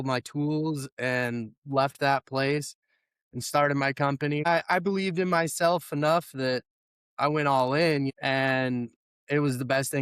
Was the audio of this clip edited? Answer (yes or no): yes